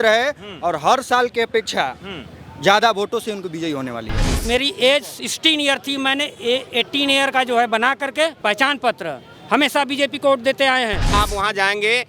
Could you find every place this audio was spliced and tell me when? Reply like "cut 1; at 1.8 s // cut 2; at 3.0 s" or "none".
cut 1; at 4.4 s // cut 2; at 8.4 s // cut 3; at 11.1 s